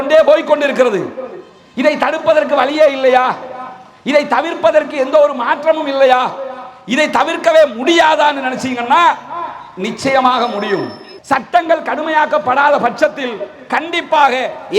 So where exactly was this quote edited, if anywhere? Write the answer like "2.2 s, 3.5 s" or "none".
11.1 s